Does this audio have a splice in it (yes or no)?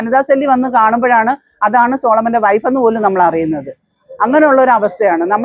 no